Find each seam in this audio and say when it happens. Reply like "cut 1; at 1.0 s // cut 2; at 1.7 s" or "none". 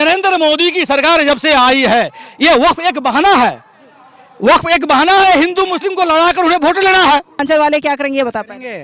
cut 1; at 7.4 s